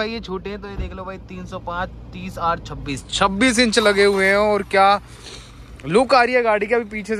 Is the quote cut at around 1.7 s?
no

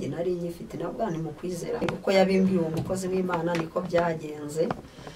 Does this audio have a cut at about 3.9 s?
no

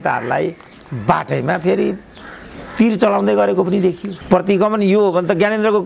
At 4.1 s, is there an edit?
yes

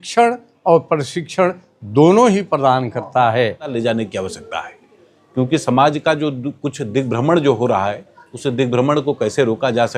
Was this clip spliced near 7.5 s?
no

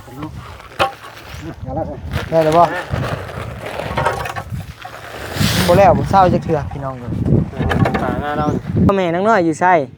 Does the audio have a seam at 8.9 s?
yes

